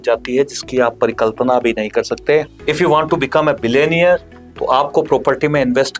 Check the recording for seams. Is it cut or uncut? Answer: cut